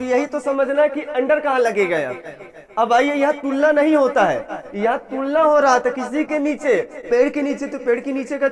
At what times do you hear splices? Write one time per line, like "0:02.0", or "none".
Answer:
none